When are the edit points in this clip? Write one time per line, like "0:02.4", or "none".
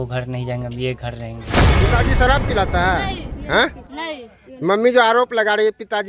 0:01.7